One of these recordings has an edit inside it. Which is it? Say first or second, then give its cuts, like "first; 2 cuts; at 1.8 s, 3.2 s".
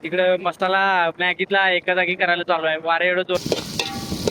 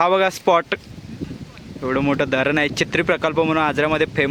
first; 1 cut; at 3.4 s